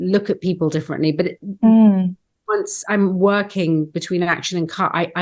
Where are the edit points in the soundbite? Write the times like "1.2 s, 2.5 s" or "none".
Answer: none